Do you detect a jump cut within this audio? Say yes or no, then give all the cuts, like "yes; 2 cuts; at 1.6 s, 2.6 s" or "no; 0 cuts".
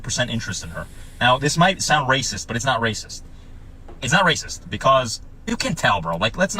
yes; 1 cut; at 3.8 s